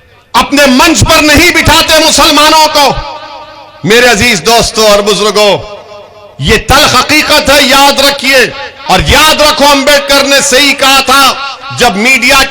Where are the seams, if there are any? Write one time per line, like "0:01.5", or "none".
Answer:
0:08.7